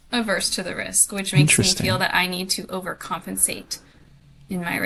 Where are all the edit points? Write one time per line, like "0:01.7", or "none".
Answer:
none